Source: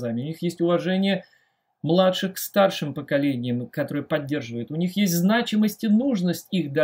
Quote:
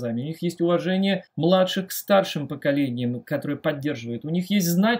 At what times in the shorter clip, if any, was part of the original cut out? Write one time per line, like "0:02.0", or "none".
0:01.3